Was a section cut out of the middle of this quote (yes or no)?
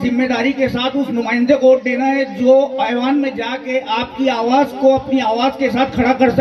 no